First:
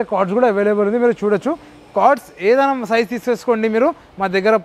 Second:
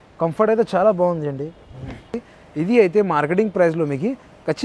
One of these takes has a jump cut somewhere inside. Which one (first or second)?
second